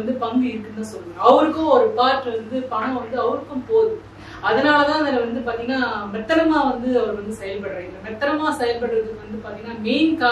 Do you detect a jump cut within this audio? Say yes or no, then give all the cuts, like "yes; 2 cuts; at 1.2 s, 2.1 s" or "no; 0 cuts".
no; 0 cuts